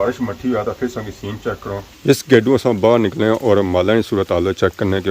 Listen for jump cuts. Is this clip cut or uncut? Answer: cut